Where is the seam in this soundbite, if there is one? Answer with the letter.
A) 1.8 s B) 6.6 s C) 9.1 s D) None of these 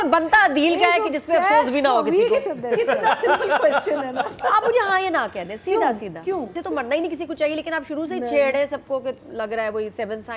B